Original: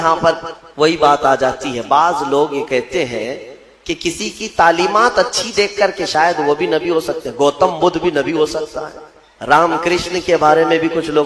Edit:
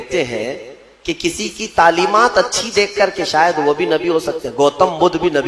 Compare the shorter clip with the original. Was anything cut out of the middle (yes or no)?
no